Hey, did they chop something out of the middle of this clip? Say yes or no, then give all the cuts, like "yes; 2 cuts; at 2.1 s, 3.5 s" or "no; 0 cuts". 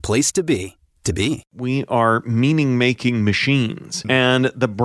yes; 2 cuts; at 1.5 s, 3.9 s